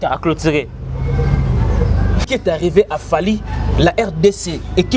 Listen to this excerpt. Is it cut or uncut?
cut